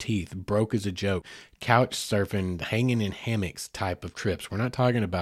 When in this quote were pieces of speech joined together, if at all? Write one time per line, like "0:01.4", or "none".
0:01.3